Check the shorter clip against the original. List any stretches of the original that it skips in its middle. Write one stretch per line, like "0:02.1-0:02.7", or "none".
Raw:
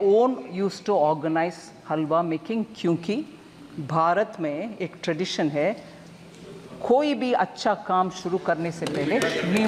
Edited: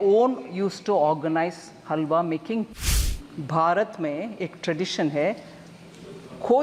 0:02.8-0:03.2